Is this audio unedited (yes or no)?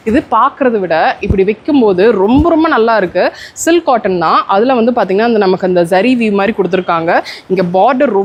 yes